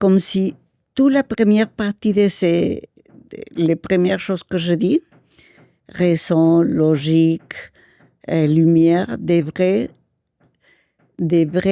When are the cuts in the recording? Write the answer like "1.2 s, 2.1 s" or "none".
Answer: none